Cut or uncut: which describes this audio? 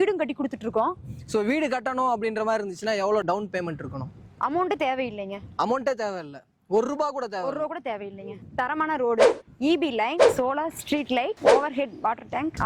cut